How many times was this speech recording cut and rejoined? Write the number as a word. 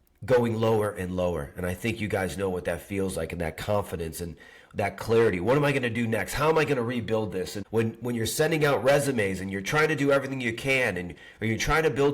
one